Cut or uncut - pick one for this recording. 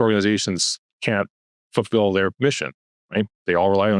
uncut